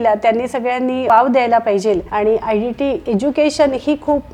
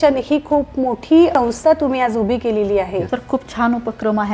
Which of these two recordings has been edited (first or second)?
second